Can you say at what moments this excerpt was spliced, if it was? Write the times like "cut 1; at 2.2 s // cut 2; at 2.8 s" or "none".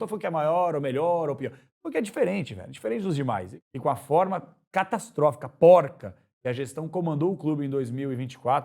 cut 1; at 3.5 s